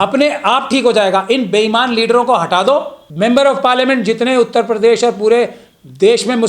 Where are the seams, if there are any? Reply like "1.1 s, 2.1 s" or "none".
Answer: 3.0 s